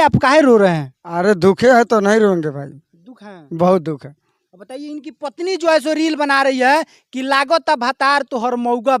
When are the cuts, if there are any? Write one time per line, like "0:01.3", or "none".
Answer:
none